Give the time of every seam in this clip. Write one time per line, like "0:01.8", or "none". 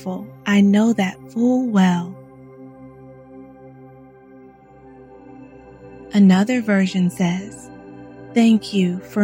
0:02.1
0:06.1